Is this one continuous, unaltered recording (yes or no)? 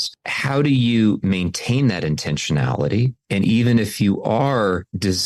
yes